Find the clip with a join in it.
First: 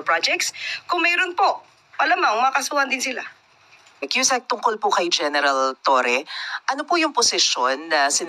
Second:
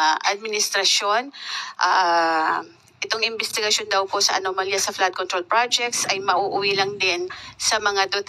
first; 1 cut; at 4.1 s

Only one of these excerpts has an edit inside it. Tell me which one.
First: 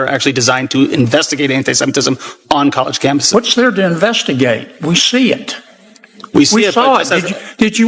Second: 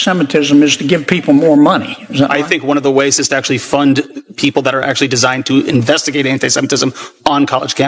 second; 1 cut; at 1.8 s

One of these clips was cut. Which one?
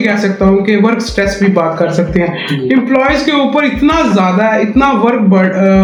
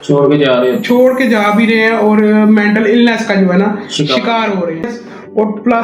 second; 1 cut; at 4.9 s

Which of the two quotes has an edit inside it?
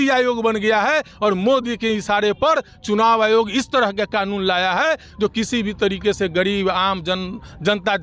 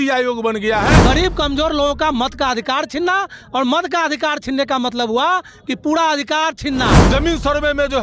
second; 2 cuts; at 1.0 s, 7.0 s

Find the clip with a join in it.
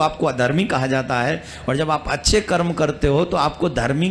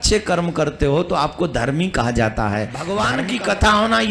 second; 1 cut; at 2.8 s

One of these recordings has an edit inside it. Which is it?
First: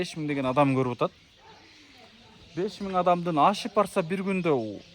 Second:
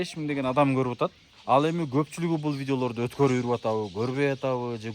second; 1 cut; at 1.3 s

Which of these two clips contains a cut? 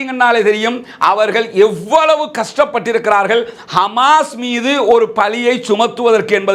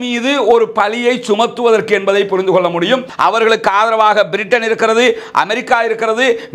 second; 1 cut; at 3.1 s

